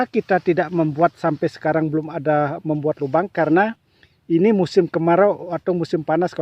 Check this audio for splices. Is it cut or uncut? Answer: uncut